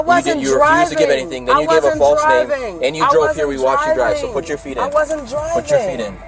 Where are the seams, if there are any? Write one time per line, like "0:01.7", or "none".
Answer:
none